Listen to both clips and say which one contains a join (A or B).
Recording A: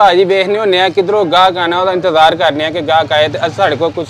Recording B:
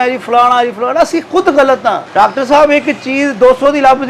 B